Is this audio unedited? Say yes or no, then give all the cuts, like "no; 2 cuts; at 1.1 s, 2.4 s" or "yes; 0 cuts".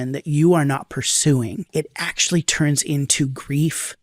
no; 1 cut; at 1.7 s